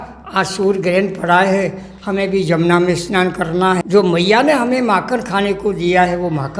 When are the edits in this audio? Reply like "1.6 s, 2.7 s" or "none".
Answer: 3.8 s